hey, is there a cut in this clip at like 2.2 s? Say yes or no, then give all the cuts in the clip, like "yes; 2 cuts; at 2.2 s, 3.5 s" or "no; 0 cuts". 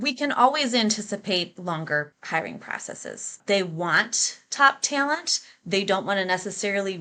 yes; 2 cuts; at 2.2 s, 3.4 s